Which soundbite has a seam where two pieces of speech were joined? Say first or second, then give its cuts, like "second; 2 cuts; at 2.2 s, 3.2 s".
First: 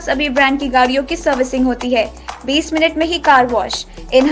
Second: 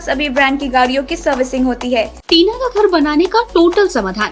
second; 1 cut; at 2.2 s